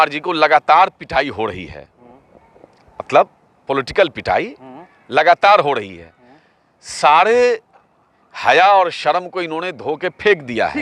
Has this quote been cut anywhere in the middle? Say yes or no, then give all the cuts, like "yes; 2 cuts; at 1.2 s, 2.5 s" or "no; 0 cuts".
no; 0 cuts